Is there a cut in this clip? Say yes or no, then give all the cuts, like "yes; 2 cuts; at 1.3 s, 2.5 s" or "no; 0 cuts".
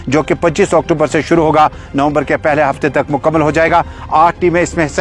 no; 0 cuts